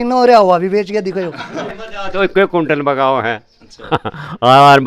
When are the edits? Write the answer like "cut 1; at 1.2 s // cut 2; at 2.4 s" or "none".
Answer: cut 1; at 1.7 s